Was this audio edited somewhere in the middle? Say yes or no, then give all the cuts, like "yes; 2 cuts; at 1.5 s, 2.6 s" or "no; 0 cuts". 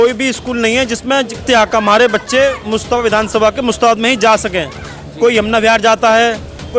no; 0 cuts